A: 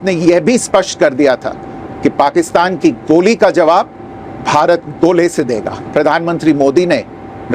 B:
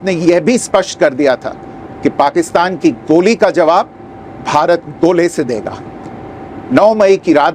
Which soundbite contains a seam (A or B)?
A